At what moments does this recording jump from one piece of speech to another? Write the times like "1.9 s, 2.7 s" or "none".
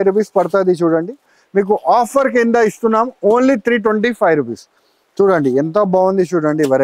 1.4 s